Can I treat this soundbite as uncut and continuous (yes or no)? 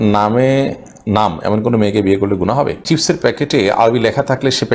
no